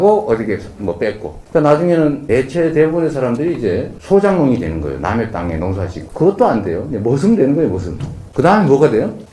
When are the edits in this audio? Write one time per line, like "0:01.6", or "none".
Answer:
0:05.9

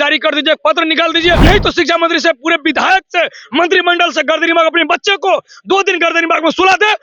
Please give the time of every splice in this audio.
0:01.4

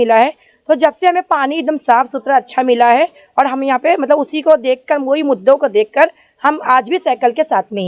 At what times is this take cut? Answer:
none

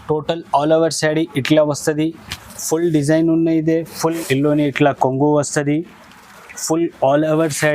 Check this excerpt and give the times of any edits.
0:04.2

